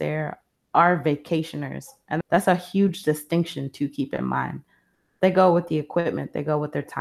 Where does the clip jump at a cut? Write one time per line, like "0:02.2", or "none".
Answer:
0:02.2